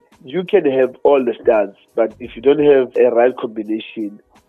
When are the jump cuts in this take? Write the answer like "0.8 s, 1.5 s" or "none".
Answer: none

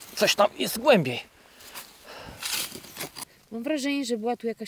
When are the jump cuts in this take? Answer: 3.3 s

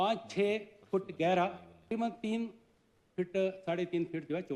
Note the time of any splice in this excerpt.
1.9 s

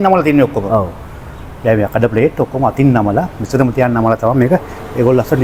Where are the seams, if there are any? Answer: none

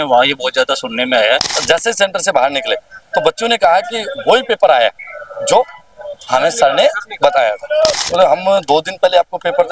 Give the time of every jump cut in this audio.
1.6 s, 8.0 s

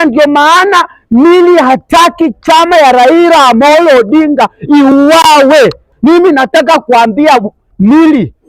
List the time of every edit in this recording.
5.9 s

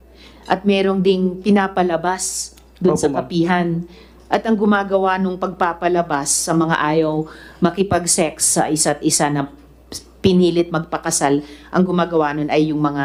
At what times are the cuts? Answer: none

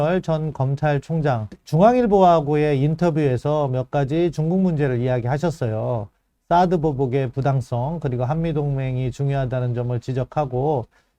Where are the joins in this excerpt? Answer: 1.6 s

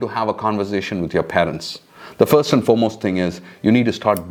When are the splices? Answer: none

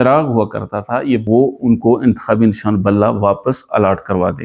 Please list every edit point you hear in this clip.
1.2 s

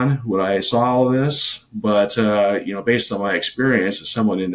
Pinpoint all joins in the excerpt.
none

